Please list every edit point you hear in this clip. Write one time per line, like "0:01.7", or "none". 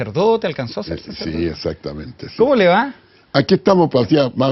0:03.0